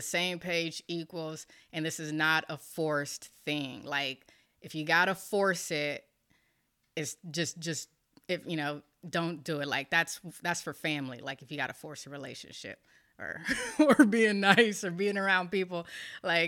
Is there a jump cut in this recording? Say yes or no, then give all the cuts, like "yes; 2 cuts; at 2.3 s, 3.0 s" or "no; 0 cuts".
no; 0 cuts